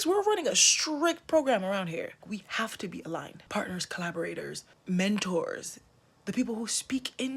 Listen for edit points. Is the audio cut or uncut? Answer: cut